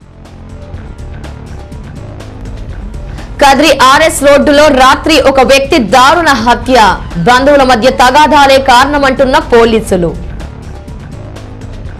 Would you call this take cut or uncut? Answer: cut